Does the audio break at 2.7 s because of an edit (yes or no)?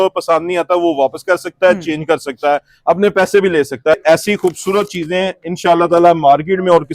no